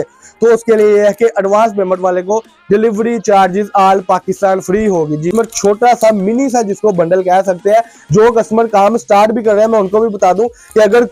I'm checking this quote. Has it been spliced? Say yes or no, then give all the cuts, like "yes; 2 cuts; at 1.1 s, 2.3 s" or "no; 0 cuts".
yes; 1 cut; at 5.3 s